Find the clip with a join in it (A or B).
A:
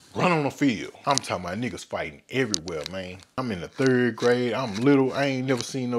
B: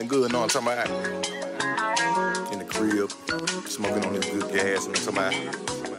A